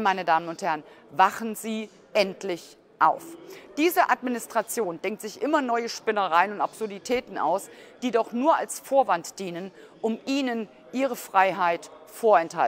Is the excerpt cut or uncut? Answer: uncut